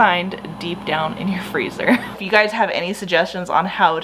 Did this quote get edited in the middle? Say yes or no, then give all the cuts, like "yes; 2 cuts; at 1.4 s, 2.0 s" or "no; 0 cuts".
yes; 1 cut; at 2.2 s